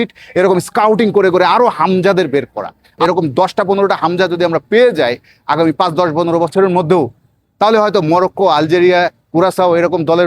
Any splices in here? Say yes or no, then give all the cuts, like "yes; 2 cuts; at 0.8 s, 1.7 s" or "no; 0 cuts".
yes; 1 cut; at 2.9 s